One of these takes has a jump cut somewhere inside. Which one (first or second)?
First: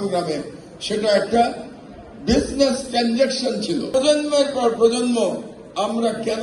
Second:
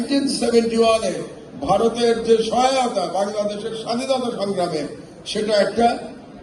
first